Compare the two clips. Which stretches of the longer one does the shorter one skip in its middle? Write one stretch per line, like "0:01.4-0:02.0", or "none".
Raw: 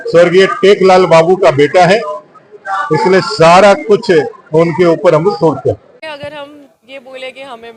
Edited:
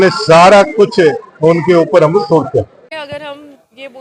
none